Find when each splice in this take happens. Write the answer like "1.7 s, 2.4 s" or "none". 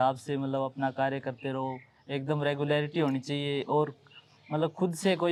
none